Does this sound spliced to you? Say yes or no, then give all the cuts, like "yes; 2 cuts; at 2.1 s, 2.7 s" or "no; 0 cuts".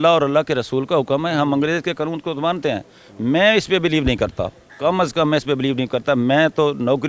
no; 0 cuts